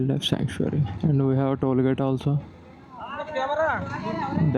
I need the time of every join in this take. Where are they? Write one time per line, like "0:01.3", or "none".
0:00.9